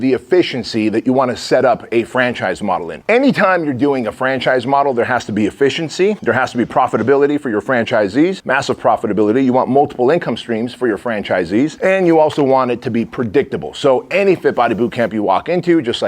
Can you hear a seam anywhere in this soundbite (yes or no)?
yes